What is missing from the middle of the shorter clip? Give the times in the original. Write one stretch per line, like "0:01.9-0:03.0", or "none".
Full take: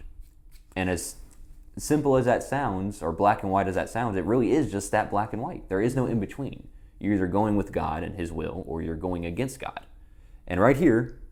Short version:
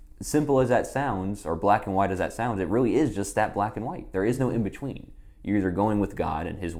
none